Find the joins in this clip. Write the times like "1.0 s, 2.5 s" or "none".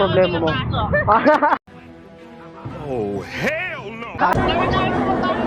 0.9 s, 4.3 s